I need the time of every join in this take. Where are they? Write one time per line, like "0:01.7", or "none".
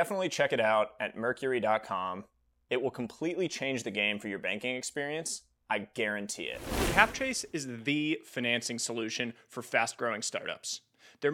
0:06.9